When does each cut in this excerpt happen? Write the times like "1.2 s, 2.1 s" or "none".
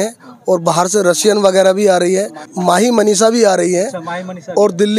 2.4 s